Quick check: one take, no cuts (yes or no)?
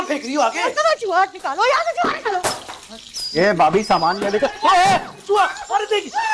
yes